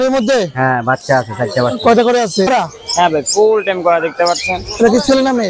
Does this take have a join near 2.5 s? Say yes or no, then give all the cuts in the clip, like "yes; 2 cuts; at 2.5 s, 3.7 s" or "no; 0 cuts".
yes; 1 cut; at 2.5 s